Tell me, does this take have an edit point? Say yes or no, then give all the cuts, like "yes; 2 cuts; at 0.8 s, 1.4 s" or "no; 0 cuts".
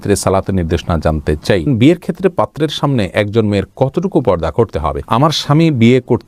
yes; 2 cuts; at 1.7 s, 5.0 s